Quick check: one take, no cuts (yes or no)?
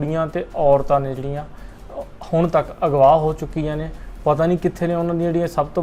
yes